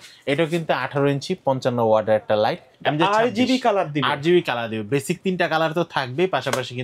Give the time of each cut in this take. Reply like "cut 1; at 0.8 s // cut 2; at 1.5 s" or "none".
cut 1; at 2.7 s

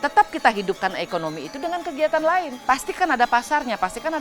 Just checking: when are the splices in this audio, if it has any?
cut 1; at 2.5 s

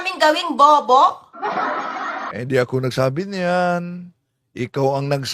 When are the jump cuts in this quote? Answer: none

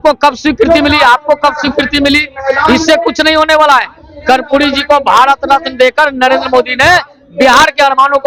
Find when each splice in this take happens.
none

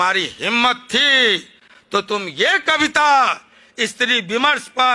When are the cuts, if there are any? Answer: none

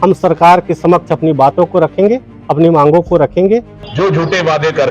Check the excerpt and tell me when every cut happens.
cut 1; at 3.8 s

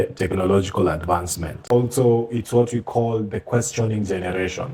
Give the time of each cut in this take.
cut 1; at 1.6 s

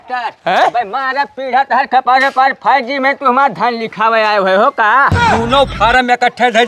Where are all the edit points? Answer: cut 1; at 5.3 s

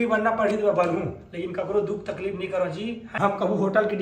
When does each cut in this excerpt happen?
cut 1; at 3.0 s

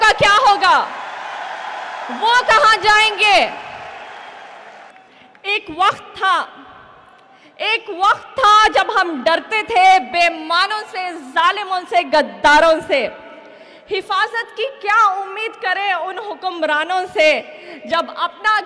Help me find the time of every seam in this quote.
cut 1; at 4.9 s

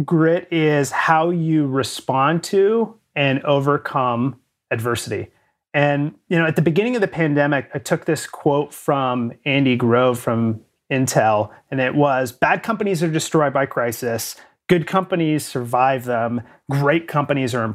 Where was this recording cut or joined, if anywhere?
none

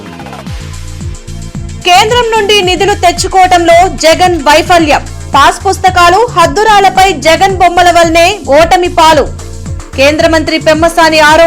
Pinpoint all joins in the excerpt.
cut 1; at 1.6 s

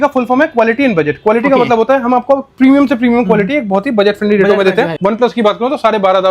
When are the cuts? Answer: cut 1; at 4.9 s

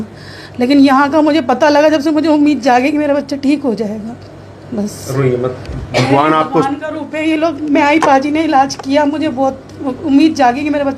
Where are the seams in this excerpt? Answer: none

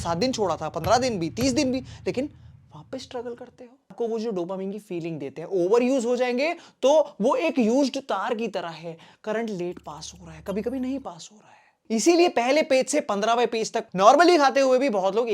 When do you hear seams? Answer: cut 1; at 3.9 s // cut 2; at 13.9 s

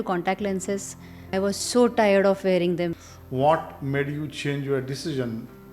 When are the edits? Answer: cut 1; at 1.3 s // cut 2; at 3.0 s

